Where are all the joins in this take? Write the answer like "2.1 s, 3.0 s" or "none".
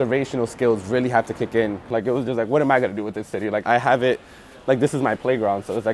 1.8 s, 3.6 s

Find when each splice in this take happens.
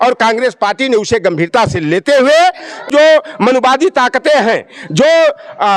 2.9 s

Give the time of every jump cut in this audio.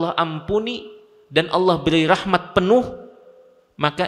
none

